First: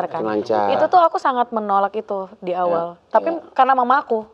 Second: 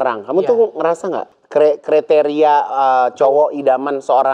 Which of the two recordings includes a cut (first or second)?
second